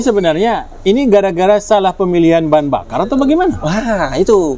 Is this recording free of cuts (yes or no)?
yes